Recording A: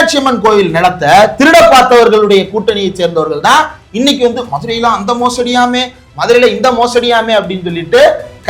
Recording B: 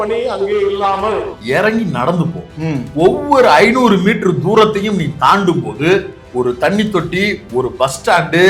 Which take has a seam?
B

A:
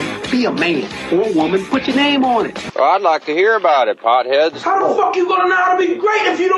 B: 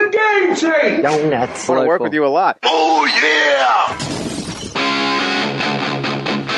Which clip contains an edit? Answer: B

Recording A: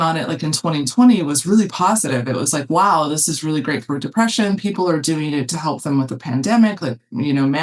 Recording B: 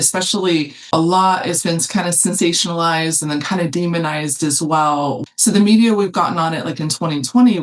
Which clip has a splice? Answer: B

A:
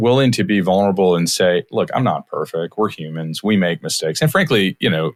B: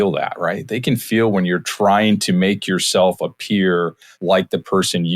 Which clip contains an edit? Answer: B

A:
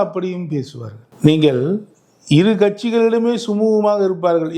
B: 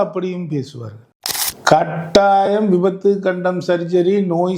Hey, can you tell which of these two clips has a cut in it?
B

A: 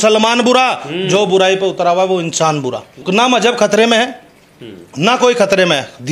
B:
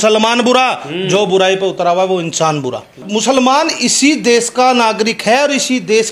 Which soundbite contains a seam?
B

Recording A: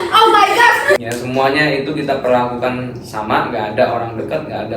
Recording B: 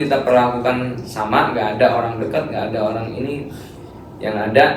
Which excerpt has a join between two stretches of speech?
A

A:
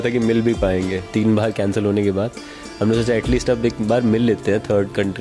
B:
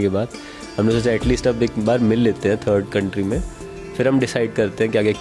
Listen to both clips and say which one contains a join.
A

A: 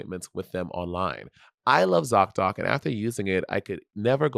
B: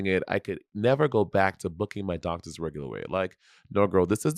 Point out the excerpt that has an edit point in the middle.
A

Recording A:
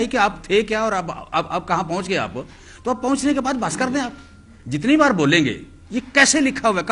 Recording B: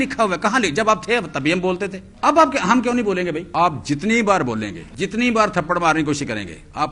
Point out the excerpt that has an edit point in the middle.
B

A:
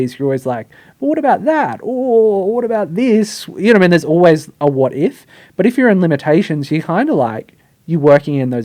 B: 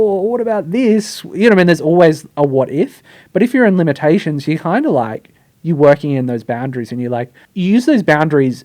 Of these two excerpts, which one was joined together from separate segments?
B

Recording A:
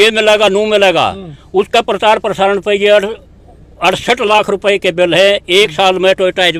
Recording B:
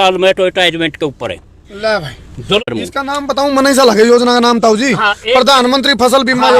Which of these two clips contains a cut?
B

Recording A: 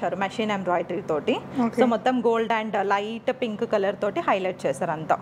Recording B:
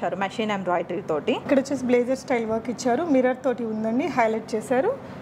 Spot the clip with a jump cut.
B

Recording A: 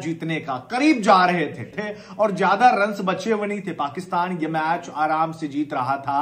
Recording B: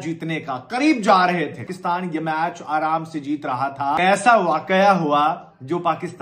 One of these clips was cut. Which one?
B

